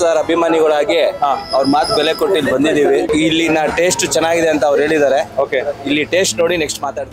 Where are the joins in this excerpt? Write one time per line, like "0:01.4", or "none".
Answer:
0:03.1